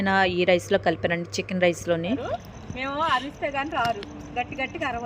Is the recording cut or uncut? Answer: cut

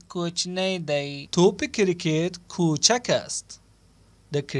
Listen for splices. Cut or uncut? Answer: uncut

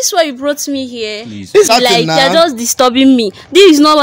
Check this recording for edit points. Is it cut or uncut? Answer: cut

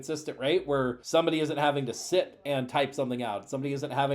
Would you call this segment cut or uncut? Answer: cut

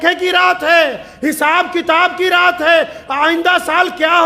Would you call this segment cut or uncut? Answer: uncut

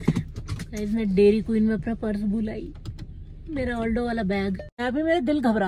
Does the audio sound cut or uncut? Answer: cut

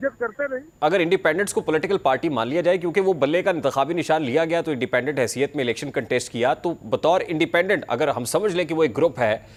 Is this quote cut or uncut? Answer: uncut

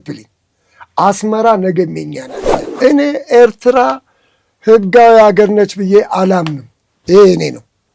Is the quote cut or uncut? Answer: cut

